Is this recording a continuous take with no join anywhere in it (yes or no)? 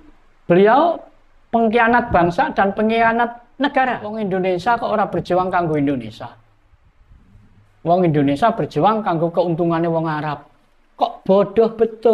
no